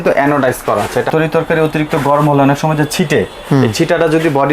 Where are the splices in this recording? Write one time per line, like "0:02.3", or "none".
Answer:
0:01.1

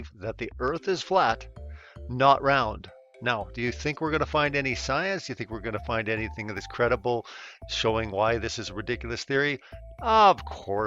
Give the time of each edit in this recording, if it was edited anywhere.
0:06.7

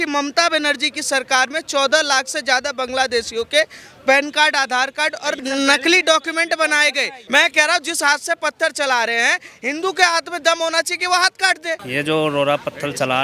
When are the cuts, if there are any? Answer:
0:05.4
0:07.2
0:11.8

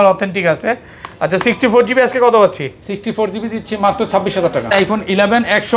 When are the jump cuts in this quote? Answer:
0:04.7

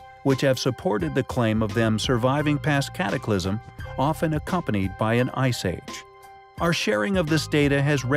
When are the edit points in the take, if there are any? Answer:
0:05.1

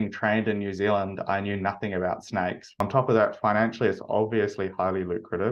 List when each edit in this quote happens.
0:02.8

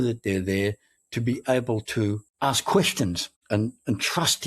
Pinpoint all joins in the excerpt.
0:02.3
0:03.3

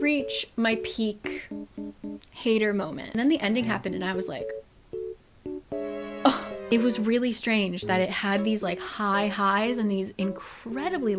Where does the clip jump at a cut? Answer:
0:03.1
0:06.7

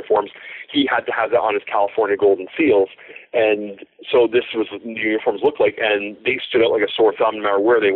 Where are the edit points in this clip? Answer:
none

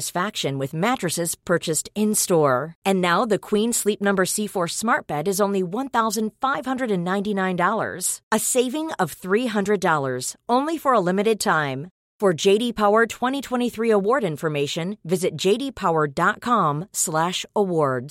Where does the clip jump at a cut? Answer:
none

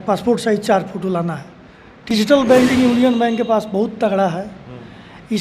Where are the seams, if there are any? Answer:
0:02.1

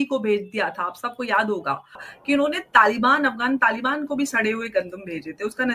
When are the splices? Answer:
0:02.0

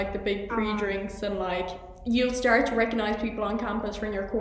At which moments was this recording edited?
none

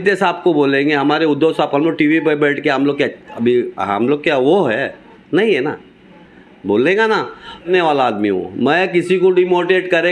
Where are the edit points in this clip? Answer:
0:07.7

